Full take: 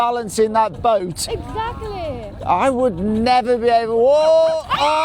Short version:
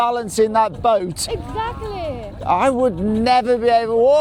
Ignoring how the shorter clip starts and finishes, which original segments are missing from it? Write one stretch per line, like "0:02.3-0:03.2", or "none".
none